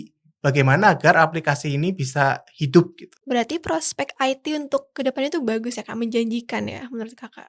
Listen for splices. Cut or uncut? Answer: cut